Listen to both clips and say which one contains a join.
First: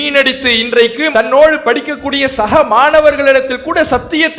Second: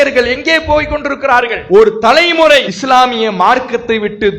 second; 2 cuts; at 1.6 s, 2.7 s

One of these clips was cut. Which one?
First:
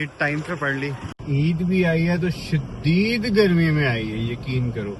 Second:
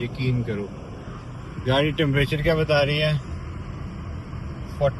first; 1 cut; at 1.1 s

